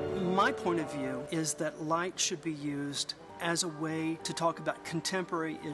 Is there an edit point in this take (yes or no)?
yes